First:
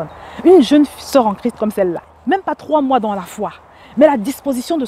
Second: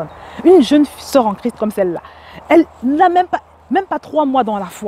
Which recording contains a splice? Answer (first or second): first